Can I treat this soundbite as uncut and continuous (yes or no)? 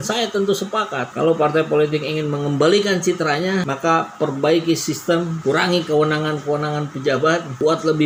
yes